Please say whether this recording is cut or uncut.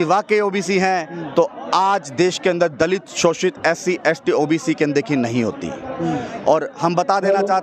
uncut